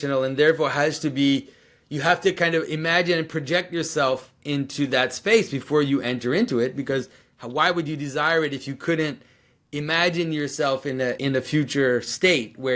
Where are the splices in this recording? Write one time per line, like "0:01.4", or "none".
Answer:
0:11.2